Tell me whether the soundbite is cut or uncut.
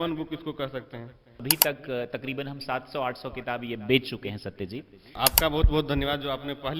cut